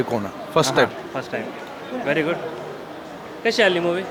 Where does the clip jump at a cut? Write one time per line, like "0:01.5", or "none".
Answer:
none